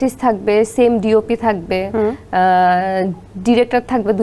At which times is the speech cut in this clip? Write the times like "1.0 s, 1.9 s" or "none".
none